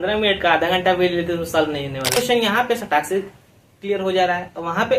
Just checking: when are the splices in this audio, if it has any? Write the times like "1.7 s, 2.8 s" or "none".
2.1 s